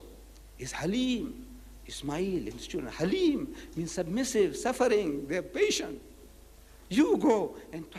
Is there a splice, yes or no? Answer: no